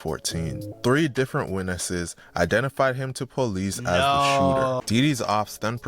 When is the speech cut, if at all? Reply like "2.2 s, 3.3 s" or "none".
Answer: 4.8 s